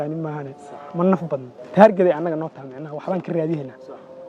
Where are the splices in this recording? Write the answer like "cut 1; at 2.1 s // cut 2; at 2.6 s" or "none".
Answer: cut 1; at 1.6 s